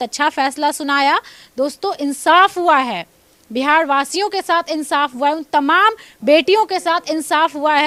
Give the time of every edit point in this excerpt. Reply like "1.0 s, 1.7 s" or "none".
none

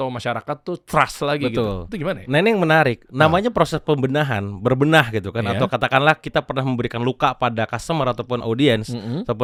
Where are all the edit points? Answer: none

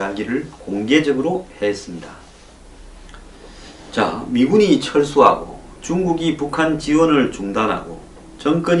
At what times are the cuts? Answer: 6.5 s

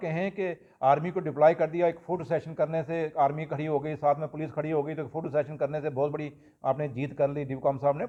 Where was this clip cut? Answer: none

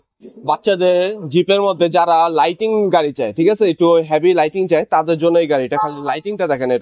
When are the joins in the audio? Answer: none

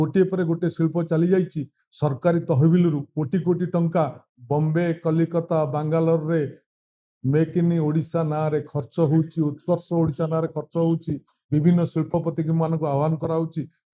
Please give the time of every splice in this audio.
none

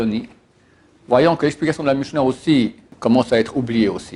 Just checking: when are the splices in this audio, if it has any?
2.9 s

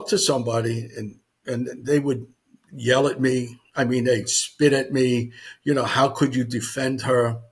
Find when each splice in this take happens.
none

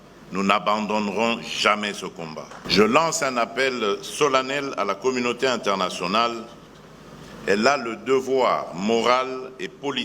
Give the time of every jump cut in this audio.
2.5 s

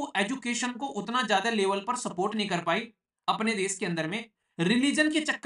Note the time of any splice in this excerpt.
none

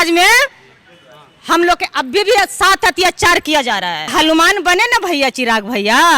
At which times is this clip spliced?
4.0 s

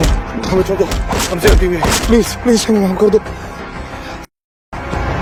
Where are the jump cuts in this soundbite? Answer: none

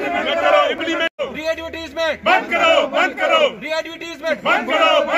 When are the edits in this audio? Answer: 1.0 s

